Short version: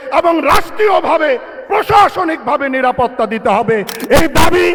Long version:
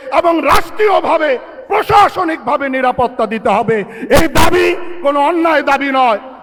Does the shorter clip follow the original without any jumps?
yes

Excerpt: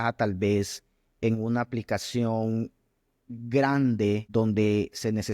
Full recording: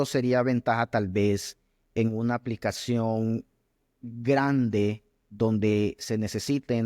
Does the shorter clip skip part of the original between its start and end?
yes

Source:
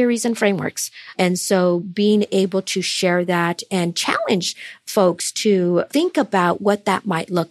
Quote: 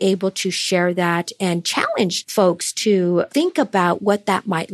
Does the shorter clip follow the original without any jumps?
no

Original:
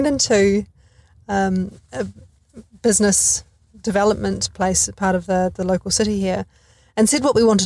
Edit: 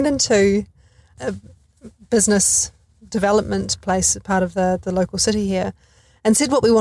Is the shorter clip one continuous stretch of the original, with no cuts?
no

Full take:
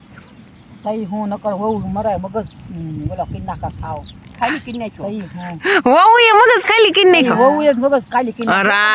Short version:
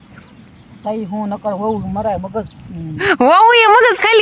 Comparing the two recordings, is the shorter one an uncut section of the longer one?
no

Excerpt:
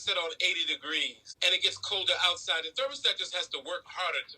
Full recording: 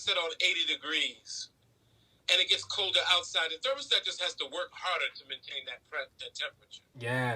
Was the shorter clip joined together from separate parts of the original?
yes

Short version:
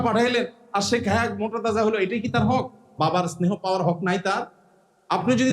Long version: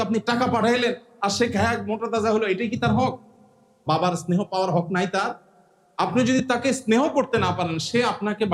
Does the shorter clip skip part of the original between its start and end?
yes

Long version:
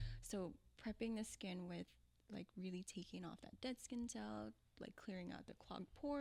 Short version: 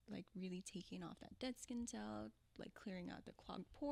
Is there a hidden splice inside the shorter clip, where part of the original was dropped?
no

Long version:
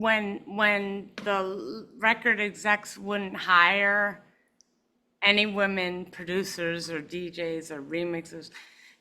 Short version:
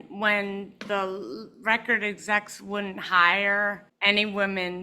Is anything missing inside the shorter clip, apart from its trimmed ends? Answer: yes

